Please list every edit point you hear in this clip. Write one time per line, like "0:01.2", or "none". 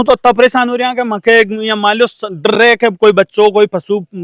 none